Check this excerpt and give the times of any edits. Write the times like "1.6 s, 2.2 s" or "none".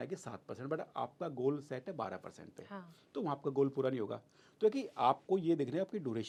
none